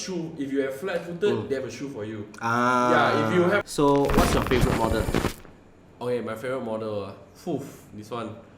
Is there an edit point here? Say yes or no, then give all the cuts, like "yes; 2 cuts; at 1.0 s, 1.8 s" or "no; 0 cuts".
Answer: yes; 1 cut; at 3.6 s